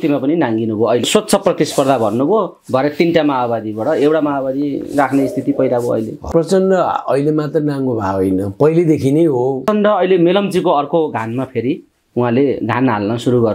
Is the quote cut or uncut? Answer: cut